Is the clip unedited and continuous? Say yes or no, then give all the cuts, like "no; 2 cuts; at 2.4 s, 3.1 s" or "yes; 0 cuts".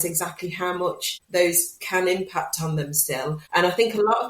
no; 2 cuts; at 1.1 s, 3.4 s